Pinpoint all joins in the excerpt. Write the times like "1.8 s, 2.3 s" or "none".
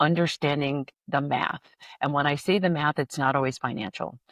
1.0 s